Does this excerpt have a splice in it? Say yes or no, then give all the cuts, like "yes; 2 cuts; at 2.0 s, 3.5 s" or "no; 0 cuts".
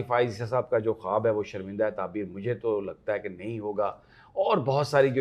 no; 0 cuts